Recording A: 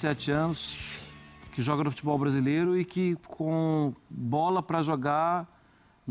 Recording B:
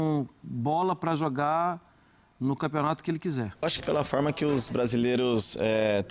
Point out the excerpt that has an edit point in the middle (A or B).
B